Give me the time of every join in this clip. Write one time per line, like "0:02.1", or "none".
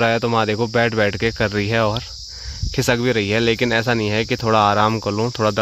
none